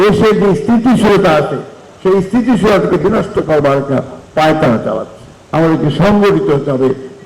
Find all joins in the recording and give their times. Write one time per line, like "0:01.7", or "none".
0:05.4